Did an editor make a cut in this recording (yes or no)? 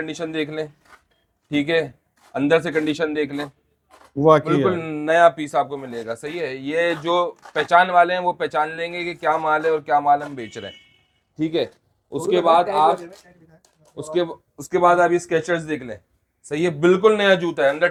no